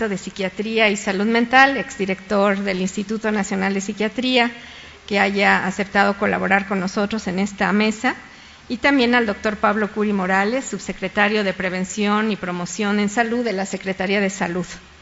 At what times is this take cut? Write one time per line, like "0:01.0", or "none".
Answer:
0:06.4